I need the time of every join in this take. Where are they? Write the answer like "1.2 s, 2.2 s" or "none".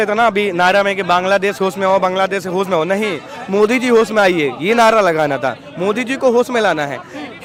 none